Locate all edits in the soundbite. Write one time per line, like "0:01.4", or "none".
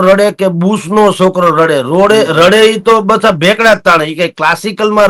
none